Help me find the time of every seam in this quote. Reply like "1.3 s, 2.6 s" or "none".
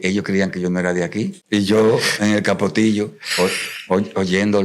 1.4 s